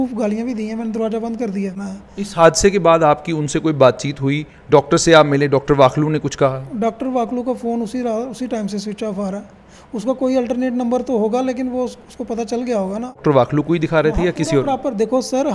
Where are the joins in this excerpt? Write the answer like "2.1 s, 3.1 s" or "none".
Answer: 1.8 s, 13.2 s